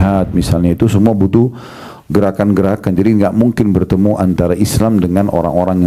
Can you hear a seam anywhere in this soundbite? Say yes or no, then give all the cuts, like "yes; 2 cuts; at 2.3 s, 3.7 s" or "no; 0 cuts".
no; 0 cuts